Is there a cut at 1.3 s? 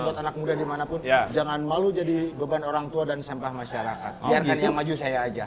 yes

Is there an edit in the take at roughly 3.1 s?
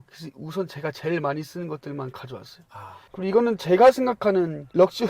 yes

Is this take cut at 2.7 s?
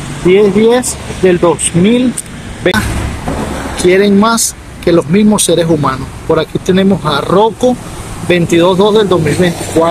yes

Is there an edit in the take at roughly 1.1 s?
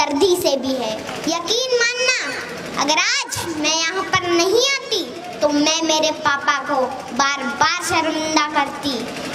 yes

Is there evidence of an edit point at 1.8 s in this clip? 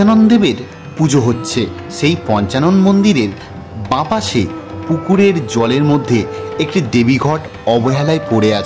no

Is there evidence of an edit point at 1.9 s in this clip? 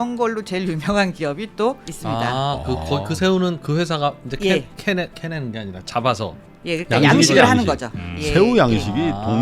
yes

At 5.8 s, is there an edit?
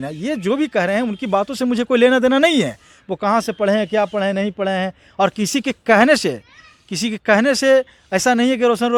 no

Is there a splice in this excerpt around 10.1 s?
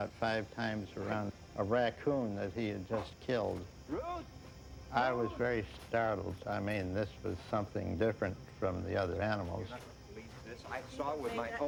no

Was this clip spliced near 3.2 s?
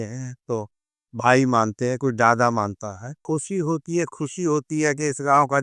yes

